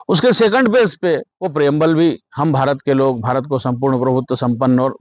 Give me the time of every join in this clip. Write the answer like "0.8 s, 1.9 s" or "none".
1.3 s